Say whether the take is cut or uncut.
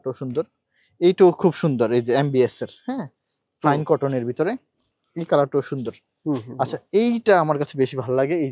uncut